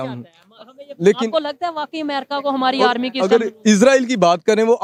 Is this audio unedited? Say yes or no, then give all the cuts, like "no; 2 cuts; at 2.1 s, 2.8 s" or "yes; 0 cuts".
yes; 0 cuts